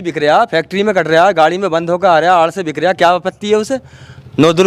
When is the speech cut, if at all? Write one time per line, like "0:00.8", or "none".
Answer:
none